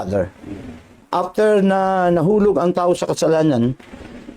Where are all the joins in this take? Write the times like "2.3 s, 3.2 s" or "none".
1.0 s

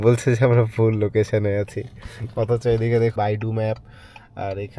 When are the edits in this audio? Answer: 3.1 s

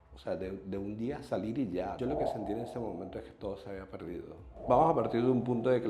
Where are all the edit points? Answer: 2.0 s, 4.5 s

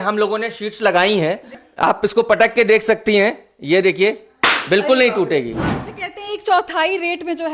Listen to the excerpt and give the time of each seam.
1.6 s, 5.8 s

